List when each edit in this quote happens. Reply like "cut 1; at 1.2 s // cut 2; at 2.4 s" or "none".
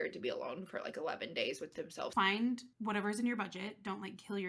cut 1; at 2.1 s // cut 2; at 2.7 s